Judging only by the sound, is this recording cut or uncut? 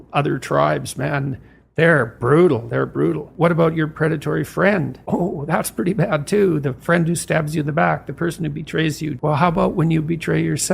cut